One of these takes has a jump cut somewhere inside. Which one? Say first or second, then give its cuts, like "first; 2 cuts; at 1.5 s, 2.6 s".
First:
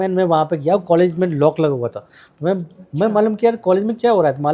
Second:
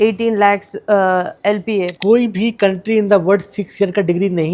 second; 1 cut; at 1.9 s